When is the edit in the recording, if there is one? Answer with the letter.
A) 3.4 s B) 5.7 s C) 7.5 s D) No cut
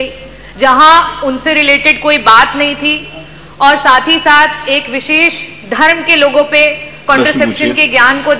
D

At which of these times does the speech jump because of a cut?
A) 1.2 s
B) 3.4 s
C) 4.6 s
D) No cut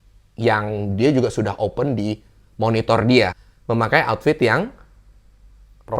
B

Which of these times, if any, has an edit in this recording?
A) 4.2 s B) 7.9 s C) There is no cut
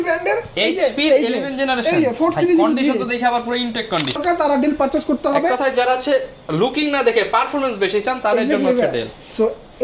A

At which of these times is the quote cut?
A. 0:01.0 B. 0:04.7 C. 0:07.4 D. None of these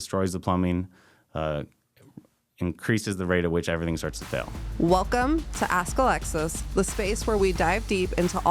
B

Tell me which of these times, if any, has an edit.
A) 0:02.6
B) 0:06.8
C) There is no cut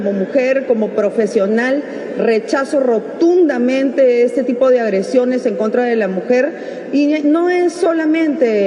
C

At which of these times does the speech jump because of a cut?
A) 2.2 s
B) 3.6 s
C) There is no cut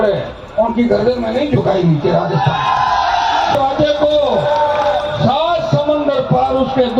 B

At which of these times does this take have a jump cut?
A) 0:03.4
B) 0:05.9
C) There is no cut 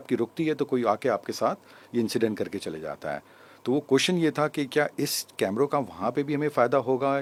C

